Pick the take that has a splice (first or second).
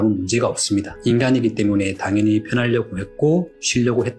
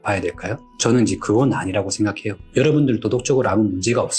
second